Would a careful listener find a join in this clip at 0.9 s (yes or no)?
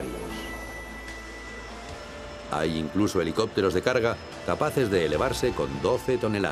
yes